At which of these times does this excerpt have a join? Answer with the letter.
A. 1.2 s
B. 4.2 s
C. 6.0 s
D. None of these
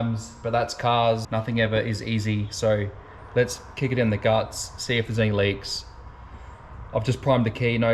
A